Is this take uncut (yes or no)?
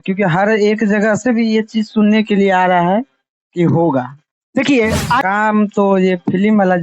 no